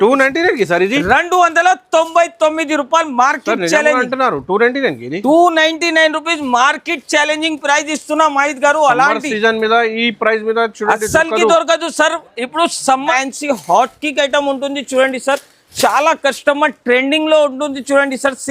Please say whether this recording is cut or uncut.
cut